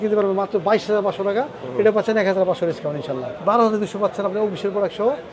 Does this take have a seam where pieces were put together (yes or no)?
yes